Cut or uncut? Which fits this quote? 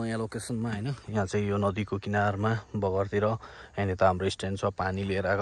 uncut